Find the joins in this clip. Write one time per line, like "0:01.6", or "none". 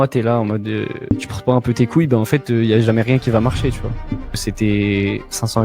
0:01.0
0:04.4